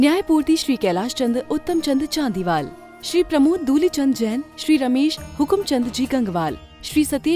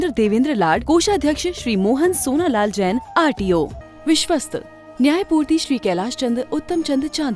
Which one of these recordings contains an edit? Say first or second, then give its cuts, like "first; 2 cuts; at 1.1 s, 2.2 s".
second; 1 cut; at 3.8 s